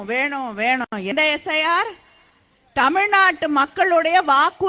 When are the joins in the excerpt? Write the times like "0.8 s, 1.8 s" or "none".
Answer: none